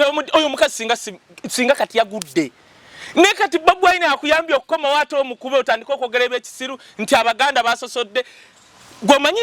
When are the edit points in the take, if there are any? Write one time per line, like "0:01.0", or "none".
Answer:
none